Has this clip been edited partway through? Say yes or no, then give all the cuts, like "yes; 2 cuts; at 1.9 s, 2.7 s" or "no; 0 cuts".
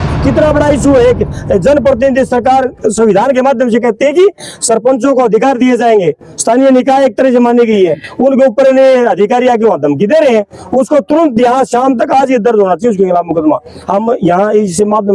no; 0 cuts